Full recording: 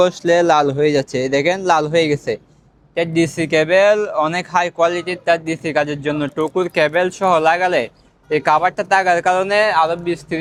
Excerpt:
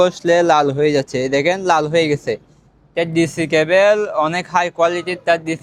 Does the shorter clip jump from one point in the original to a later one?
no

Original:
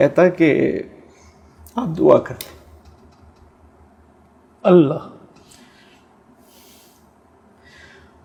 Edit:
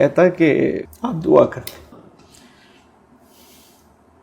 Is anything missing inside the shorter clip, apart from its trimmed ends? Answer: yes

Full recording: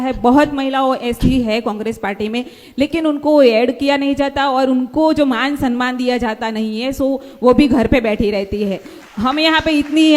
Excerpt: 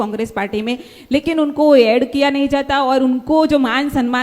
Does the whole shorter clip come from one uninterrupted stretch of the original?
yes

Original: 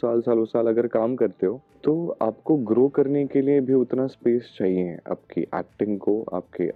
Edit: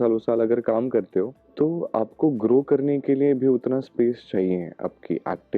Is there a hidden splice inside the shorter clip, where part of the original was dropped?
no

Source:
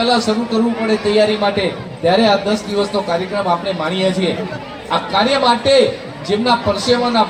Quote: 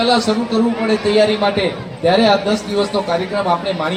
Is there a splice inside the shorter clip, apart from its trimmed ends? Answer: no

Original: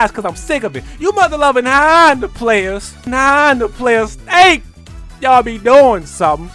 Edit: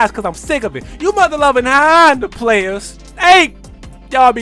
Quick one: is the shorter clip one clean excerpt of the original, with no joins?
no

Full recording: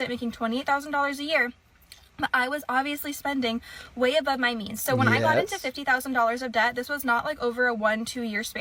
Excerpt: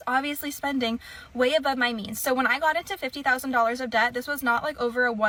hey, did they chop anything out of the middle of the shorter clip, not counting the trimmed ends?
no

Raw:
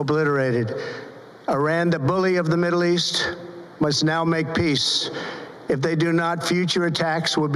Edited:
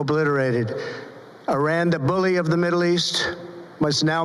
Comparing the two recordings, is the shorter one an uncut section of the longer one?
yes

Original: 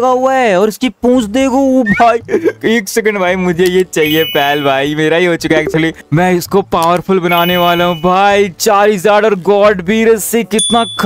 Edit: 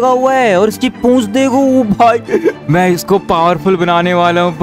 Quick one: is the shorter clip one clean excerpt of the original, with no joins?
no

